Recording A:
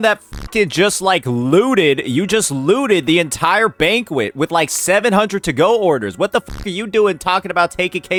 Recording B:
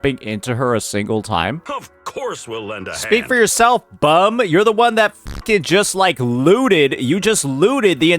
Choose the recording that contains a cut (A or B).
B